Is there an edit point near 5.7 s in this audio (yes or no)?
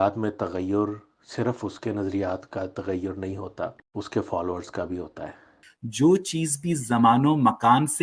yes